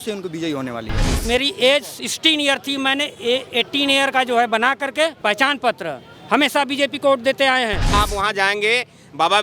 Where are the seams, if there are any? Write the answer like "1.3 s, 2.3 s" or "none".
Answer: 1.2 s, 5.2 s, 7.9 s